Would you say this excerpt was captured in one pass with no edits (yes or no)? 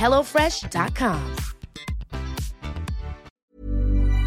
no